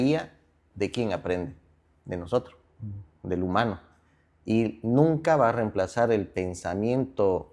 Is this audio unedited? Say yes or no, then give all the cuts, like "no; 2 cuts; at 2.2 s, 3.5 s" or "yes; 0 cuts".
yes; 0 cuts